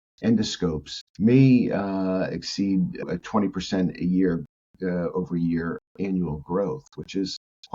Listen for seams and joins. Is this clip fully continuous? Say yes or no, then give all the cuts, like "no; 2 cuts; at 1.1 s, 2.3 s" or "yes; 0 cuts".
no; 1 cut; at 3.0 s